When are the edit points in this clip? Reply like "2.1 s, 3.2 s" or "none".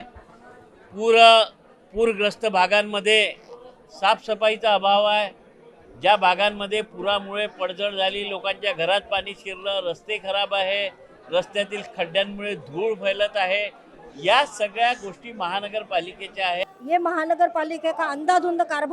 16.6 s